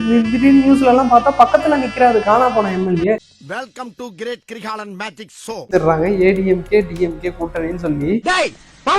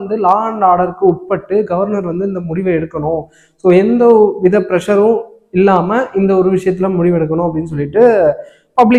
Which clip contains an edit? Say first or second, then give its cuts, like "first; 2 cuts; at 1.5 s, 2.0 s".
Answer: first; 1 cut; at 5.7 s